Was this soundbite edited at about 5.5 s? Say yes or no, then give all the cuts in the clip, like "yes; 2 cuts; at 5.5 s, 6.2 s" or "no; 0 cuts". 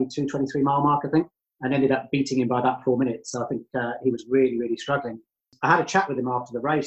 yes; 1 cut; at 5.5 s